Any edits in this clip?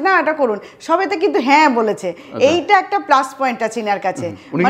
no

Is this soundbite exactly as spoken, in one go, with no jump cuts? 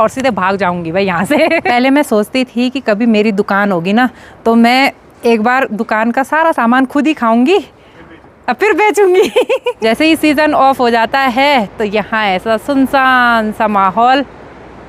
no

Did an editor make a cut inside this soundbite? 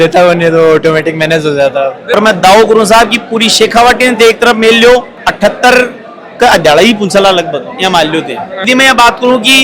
yes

